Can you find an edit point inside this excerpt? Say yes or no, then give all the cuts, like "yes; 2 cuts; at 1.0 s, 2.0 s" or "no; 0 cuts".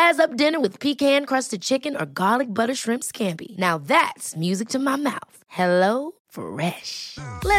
no; 0 cuts